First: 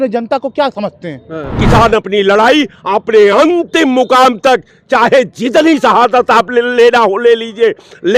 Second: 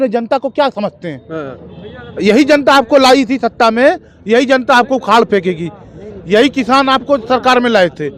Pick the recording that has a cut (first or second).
first